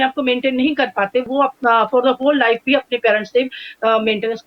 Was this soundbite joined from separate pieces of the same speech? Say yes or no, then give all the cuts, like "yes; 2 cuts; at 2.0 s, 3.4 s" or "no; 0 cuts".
yes; 1 cut; at 1.3 s